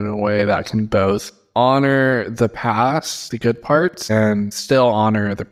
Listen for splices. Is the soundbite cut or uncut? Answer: uncut